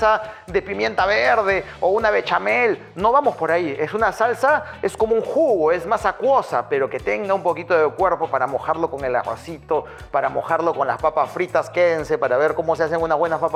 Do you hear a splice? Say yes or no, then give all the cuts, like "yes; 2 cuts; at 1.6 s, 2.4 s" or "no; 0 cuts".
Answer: no; 0 cuts